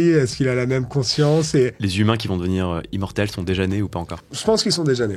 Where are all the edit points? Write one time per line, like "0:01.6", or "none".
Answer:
0:01.8
0:04.3